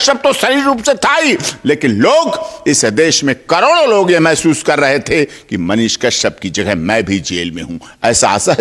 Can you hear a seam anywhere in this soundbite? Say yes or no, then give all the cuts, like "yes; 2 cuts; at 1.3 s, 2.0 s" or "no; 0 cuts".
no; 0 cuts